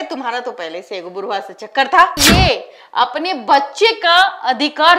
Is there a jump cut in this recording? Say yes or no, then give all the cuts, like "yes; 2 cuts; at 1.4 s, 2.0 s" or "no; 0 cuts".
yes; 1 cut; at 2.2 s